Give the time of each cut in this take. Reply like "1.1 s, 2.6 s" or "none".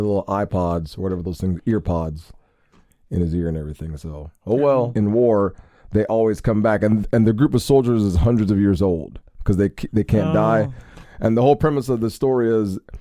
4.9 s

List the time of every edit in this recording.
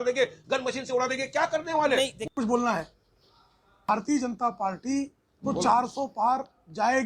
2.2 s

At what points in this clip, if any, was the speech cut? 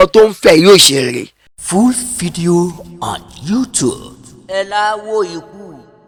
none

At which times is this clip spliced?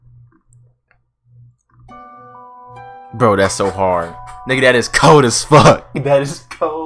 none

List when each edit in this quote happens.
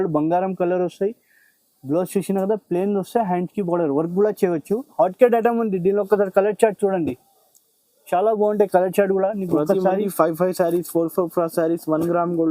4.9 s

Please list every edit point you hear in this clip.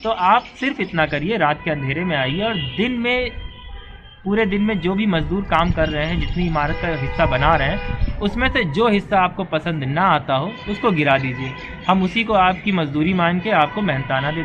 none

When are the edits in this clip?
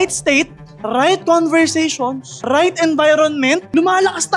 none

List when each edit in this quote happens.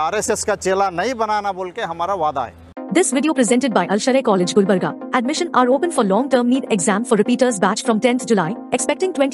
2.7 s

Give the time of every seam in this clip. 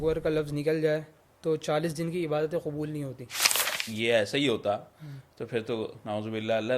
3.7 s

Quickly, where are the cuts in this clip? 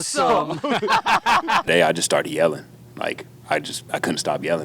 1.6 s

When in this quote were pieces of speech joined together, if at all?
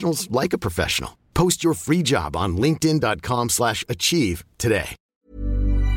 5.0 s

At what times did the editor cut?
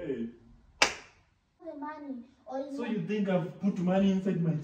1.6 s

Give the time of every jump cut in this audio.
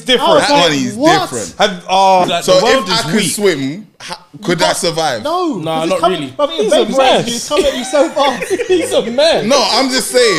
2.2 s

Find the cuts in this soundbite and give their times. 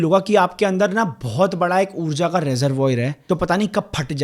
3.2 s

